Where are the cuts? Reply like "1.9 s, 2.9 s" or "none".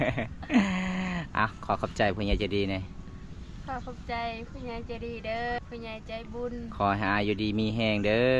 5.6 s